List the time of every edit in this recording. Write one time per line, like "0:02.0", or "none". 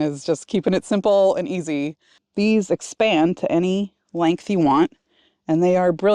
0:02.2